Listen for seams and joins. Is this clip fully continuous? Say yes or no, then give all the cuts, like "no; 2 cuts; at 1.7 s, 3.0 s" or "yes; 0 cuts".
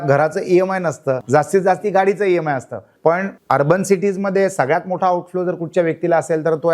no; 2 cuts; at 1.2 s, 3.0 s